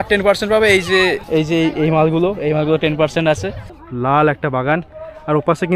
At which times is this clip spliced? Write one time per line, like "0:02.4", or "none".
0:01.2
0:03.6